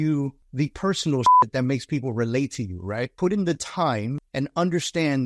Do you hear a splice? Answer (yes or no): yes